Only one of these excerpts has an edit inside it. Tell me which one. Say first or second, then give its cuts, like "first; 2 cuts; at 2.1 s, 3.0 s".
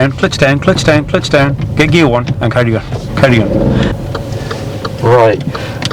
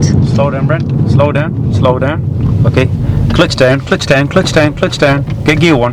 first; 1 cut; at 3.9 s